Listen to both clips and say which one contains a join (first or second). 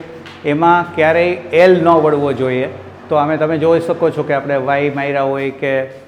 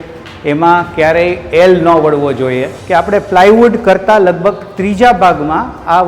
second